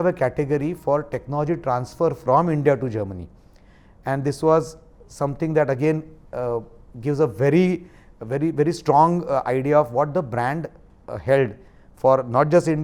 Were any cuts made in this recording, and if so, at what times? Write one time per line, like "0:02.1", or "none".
none